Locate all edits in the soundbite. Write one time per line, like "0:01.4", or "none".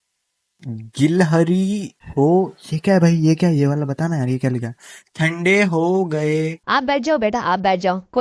0:02.0
0:06.6